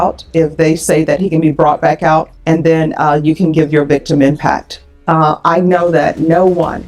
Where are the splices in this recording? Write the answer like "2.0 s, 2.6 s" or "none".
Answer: 2.3 s, 4.9 s